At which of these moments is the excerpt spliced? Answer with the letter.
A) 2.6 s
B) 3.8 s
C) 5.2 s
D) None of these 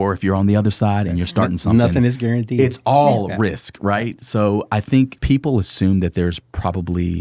C